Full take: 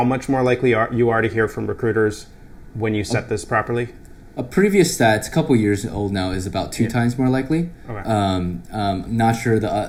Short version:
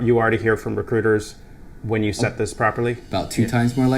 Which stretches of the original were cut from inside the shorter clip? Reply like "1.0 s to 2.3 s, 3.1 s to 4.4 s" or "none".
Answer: 4.0 s to 6.5 s